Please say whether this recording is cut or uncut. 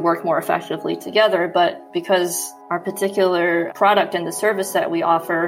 cut